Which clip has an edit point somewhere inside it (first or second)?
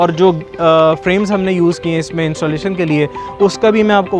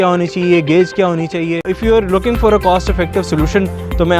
second